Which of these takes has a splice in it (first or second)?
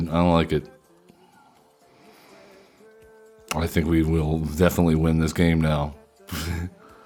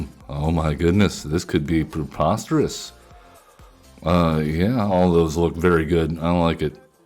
second